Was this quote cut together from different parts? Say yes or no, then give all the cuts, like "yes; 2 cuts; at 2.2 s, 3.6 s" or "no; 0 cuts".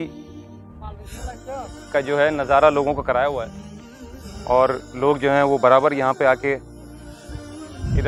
no; 0 cuts